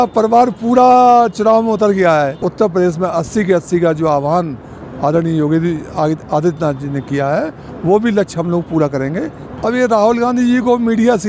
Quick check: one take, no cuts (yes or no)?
no